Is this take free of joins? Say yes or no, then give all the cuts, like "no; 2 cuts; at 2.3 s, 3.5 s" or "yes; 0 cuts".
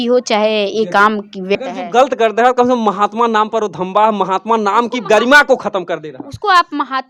no; 1 cut; at 1.6 s